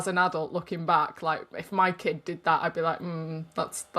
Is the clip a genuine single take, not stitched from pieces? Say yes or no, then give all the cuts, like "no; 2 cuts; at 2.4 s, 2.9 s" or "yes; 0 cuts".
yes; 0 cuts